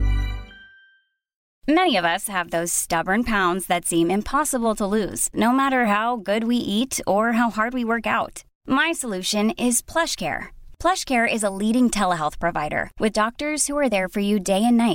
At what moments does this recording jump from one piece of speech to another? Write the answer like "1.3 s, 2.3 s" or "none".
1.4 s